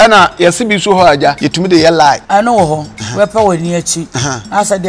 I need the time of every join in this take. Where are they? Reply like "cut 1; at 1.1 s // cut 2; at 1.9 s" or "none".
cut 1; at 1.4 s // cut 2; at 2.2 s // cut 3; at 3.0 s